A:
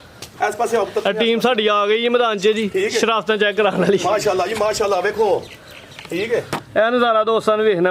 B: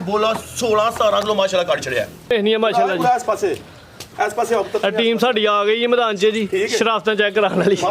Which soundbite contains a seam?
B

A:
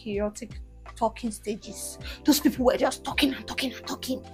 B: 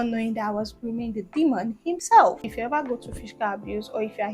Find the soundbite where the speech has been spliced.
B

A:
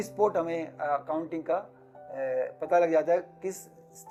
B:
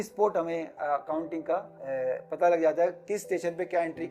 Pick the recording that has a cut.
B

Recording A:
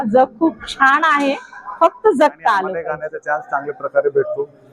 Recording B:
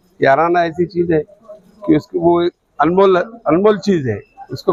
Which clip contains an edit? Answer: A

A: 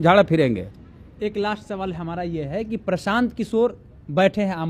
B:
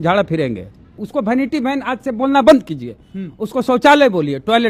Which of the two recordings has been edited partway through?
B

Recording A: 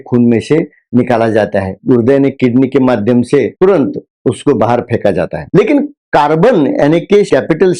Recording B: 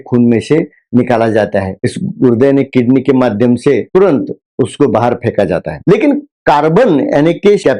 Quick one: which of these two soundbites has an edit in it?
A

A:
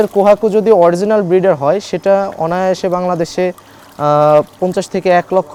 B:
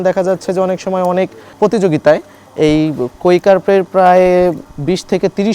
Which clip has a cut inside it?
B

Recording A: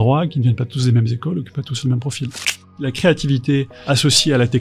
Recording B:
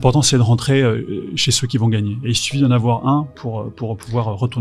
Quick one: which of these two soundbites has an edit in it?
A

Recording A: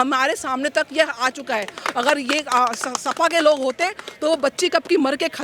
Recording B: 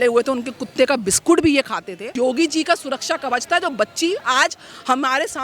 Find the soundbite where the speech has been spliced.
B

